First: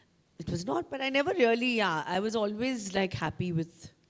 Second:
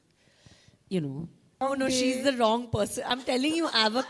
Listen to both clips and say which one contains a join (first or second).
second